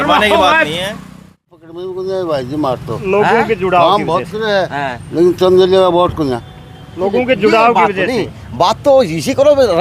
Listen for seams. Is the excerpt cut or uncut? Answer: cut